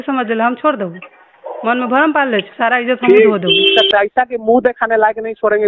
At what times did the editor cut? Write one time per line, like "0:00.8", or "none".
0:03.8